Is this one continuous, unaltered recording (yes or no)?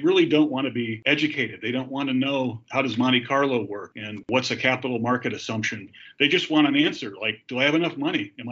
no